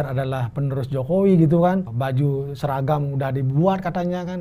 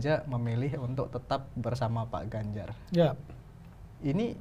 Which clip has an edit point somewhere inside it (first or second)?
first